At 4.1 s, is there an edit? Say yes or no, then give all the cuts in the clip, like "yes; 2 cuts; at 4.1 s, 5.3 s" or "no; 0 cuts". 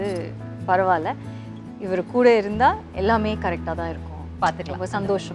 no; 0 cuts